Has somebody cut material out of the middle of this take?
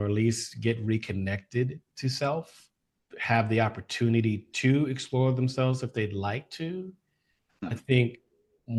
no; 0 cuts

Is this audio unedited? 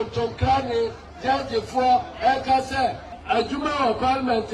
no; 1 cut; at 3.1 s

